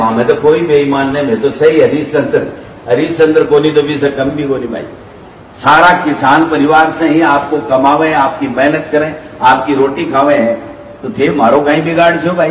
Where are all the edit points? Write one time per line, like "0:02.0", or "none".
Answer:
none